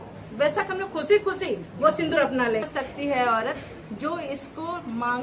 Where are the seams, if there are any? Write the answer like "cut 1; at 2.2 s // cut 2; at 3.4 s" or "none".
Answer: cut 1; at 2.7 s

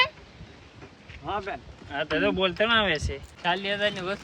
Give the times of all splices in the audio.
cut 1; at 3.3 s

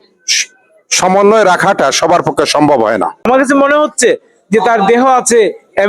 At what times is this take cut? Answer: cut 1; at 3.3 s

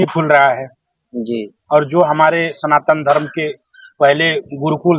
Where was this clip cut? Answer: none

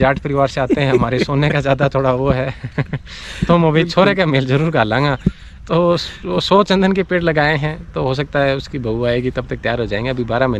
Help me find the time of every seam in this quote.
none

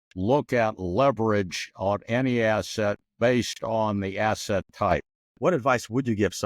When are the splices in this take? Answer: cut 1; at 5.3 s

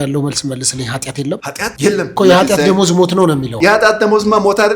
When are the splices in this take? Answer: cut 1; at 2.0 s // cut 2; at 3.5 s

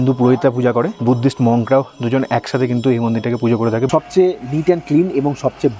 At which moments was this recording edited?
cut 1; at 0.9 s // cut 2; at 3.9 s

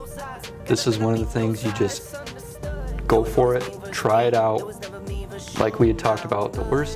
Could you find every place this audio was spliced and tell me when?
none

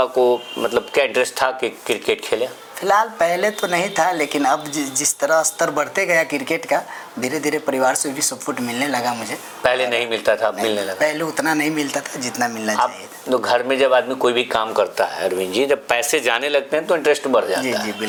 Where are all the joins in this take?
none

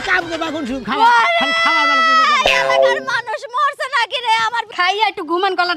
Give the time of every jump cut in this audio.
cut 1; at 4.7 s

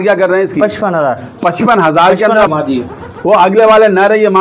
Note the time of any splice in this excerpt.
cut 1; at 2.5 s

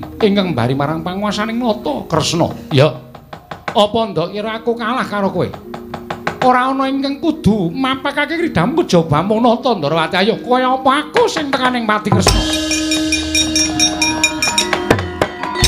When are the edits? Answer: none

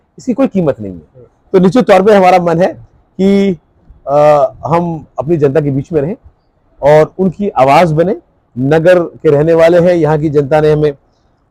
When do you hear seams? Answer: none

